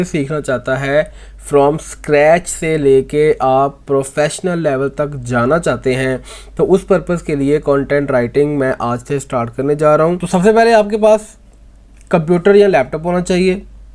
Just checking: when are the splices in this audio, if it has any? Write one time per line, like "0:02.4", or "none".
0:10.2